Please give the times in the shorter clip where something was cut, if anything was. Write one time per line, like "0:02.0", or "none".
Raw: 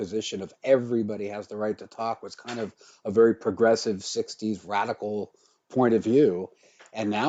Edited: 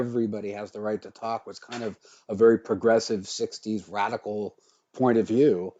none